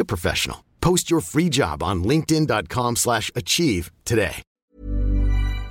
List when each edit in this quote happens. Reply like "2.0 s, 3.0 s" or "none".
4.5 s